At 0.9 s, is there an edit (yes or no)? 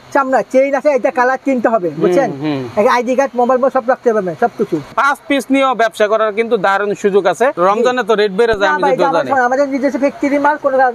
no